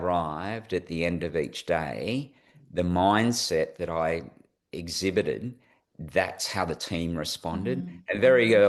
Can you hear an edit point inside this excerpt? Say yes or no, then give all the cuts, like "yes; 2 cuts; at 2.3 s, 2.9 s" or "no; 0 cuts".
no; 0 cuts